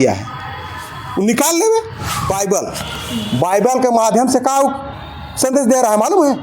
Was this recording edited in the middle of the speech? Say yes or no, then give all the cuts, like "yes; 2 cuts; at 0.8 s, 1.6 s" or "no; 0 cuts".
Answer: yes; 1 cut; at 2.3 s